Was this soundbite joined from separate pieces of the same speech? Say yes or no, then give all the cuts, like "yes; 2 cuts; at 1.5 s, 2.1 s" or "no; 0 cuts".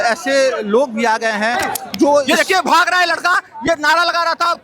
yes; 1 cut; at 2.1 s